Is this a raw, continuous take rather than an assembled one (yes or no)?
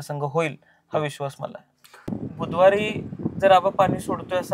no